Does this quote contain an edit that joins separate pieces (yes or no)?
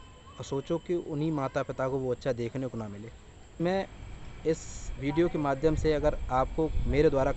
yes